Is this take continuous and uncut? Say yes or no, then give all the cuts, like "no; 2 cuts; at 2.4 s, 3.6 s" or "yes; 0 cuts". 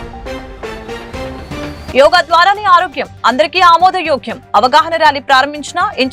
yes; 0 cuts